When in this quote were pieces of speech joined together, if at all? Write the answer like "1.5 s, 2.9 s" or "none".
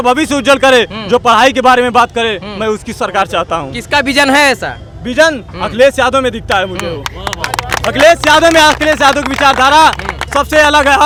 none